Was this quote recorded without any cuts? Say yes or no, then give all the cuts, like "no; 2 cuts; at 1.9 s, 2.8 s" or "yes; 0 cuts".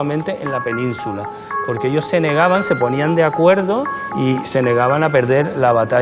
yes; 0 cuts